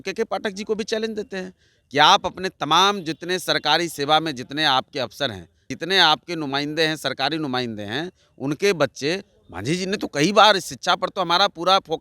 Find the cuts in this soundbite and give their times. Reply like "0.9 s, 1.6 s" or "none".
5.7 s, 9.3 s

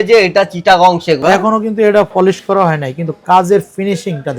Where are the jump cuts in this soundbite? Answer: 1.2 s

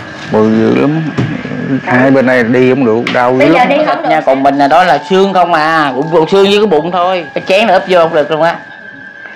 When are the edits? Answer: 4.0 s, 7.3 s

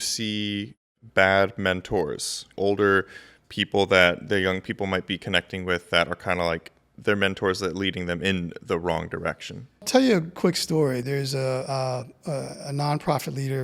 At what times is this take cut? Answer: 1.0 s, 2.4 s, 9.8 s, 11.0 s

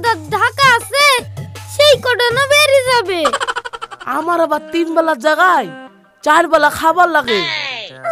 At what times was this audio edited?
3.7 s

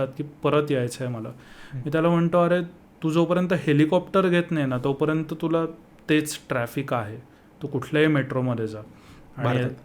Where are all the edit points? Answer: none

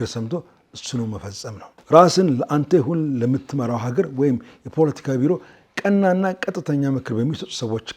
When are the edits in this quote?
1.7 s

